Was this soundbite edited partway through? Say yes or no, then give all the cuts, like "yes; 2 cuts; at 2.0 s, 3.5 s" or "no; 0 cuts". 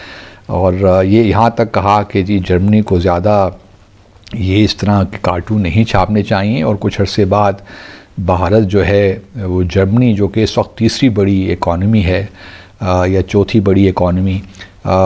no; 0 cuts